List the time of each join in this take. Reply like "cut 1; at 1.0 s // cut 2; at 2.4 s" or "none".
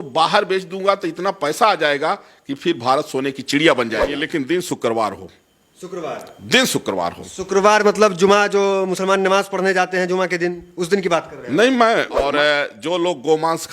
cut 1; at 4.1 s // cut 2; at 12.3 s